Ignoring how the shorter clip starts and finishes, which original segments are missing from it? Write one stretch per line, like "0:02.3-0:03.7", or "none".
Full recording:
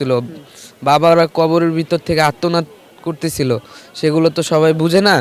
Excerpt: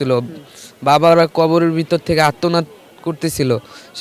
none